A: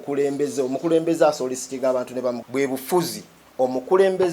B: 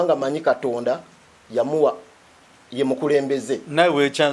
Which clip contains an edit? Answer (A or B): A